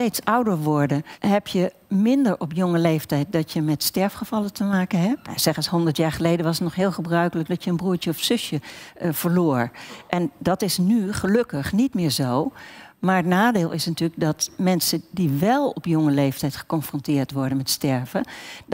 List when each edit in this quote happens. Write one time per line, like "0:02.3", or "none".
0:01.1
0:05.4